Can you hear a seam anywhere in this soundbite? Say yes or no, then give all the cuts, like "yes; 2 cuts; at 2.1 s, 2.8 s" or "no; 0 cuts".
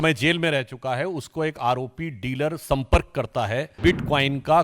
yes; 1 cut; at 3.7 s